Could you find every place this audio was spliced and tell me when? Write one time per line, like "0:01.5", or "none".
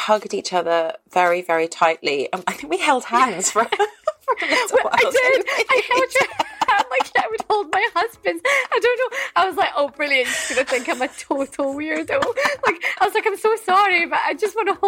none